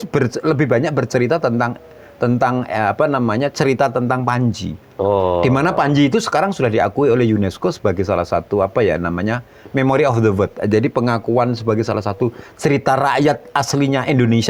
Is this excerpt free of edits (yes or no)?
yes